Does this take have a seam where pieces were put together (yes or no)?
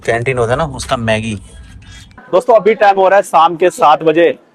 yes